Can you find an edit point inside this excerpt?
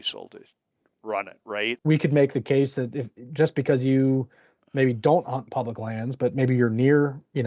yes; 1 cut; at 1.7 s

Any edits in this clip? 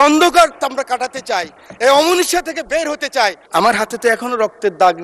yes; 1 cut; at 3.4 s

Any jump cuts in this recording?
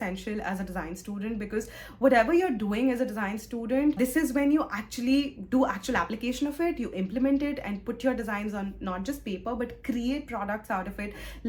no; 0 cuts

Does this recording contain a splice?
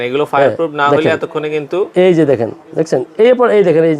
no; 0 cuts

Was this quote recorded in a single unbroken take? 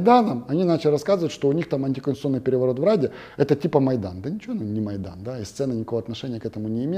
yes; 0 cuts

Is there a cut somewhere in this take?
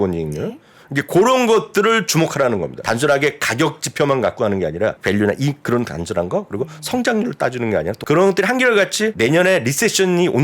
yes; 4 cuts; at 2.8 s, 5.0 s, 8.0 s, 9.1 s

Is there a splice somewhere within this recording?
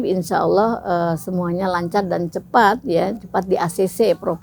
no; 0 cuts

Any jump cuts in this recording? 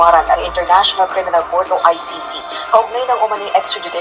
no; 0 cuts

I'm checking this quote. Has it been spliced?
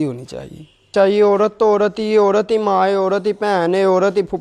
yes; 1 cut; at 0.9 s

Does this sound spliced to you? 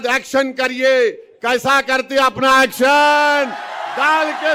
no; 0 cuts

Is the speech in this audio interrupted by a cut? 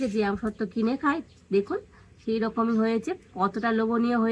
no; 0 cuts

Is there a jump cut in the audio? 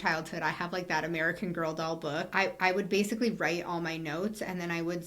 yes; 1 cut; at 2.3 s

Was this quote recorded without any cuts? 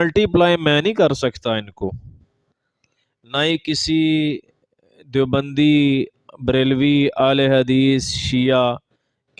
yes; 0 cuts

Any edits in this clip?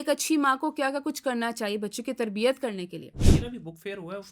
yes; 1 cut; at 3.2 s

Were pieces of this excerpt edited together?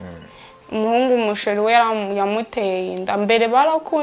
no; 0 cuts

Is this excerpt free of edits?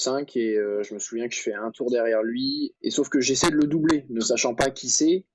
no; 1 cut; at 2.7 s

